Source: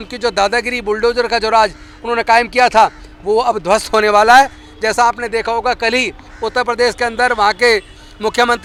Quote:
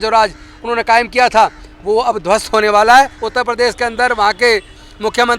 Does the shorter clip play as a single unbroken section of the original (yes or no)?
no